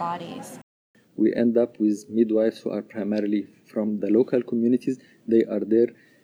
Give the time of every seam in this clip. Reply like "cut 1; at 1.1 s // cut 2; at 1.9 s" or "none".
cut 1; at 1.0 s